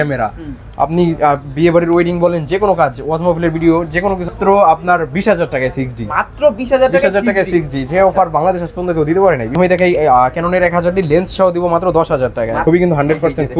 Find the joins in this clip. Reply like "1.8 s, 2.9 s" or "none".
4.3 s, 9.5 s, 12.6 s